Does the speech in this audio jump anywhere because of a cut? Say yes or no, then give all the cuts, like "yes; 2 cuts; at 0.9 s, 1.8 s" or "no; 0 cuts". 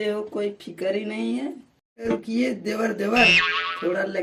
yes; 1 cut; at 2.1 s